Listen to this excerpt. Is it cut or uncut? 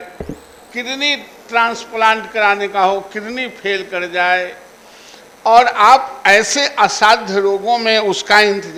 uncut